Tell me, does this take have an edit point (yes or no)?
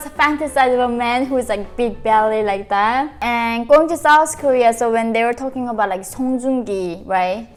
no